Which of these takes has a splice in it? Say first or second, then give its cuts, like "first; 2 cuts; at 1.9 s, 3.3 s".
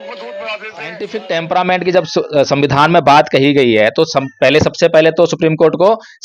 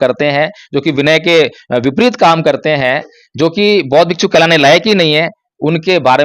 first; 1 cut; at 1.2 s